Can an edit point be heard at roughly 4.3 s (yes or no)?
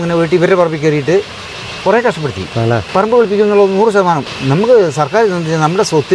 yes